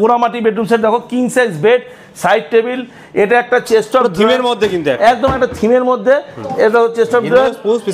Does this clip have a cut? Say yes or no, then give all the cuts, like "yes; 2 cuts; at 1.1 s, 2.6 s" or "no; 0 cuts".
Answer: no; 0 cuts